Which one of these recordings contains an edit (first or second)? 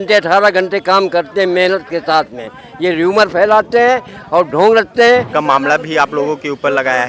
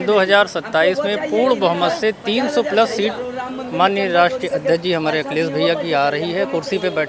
first